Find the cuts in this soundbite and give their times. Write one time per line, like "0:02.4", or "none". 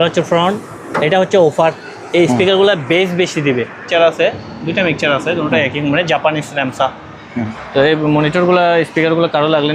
0:03.8
0:07.6